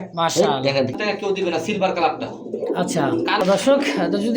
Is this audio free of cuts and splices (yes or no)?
no